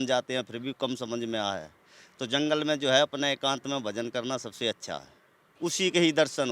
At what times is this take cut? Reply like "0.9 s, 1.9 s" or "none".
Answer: 5.4 s